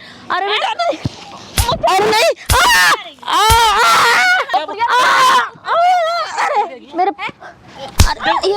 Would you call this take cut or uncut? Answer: cut